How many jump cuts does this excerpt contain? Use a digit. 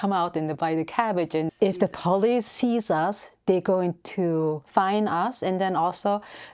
2